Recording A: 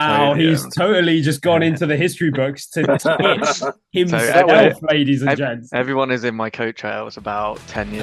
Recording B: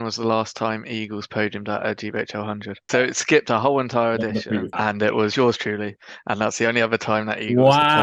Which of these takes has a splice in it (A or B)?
B